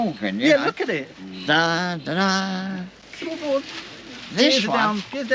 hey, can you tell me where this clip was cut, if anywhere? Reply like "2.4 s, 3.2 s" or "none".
none